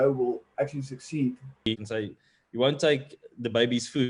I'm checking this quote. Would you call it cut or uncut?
cut